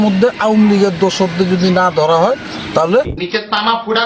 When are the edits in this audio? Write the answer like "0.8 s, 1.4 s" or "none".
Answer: 3.1 s